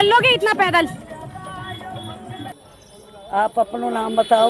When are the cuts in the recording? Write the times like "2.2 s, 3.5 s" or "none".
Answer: 2.5 s